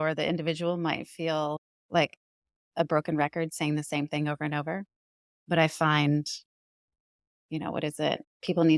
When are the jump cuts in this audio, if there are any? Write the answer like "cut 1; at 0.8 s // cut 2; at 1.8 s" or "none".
none